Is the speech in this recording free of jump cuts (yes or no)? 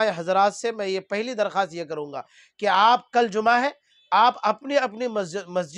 yes